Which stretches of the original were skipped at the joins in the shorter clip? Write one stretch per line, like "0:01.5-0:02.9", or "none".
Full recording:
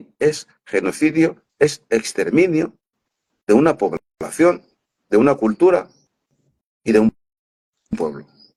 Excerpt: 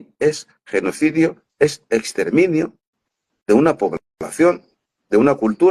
none